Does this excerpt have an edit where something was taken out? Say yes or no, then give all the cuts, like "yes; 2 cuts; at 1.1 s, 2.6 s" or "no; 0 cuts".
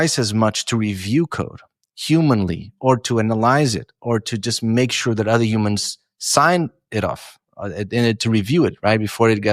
no; 0 cuts